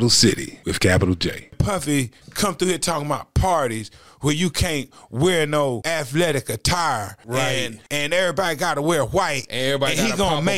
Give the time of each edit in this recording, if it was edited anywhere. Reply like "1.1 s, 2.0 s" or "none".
1.3 s, 5.8 s, 7.5 s